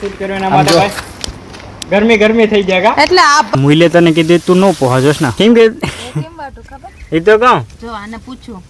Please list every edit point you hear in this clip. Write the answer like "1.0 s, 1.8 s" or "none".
3.5 s, 5.3 s